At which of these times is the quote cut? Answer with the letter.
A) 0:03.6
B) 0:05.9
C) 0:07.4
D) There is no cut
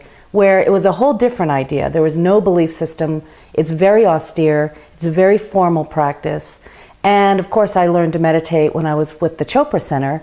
D